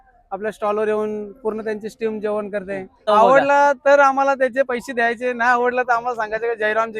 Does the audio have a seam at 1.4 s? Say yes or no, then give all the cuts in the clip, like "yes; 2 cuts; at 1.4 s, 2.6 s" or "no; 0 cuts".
no; 1 cut; at 3.0 s